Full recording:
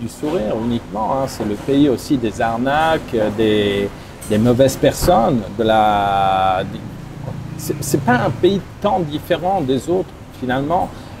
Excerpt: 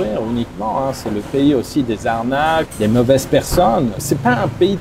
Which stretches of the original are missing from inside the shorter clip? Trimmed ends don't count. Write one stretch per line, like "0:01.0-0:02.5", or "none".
0:03.0-0:04.2
0:05.5-0:07.8